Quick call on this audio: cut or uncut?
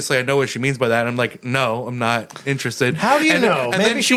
uncut